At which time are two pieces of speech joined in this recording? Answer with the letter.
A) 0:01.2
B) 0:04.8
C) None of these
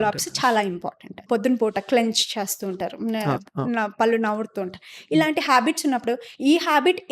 A